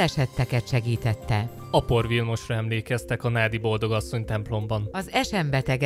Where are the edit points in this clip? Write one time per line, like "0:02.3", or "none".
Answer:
0:04.9